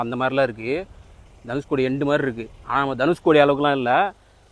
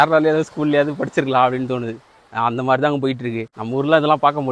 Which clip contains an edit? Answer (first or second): second